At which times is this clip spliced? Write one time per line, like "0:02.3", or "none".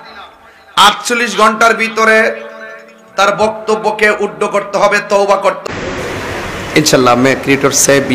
0:05.6